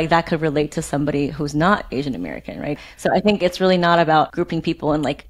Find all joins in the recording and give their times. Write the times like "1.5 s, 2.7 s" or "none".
2.8 s, 4.3 s

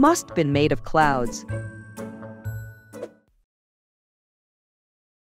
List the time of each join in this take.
none

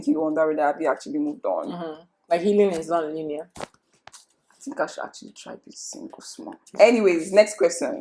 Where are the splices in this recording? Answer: none

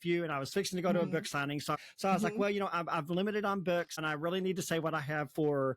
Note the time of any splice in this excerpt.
1.8 s, 4.0 s

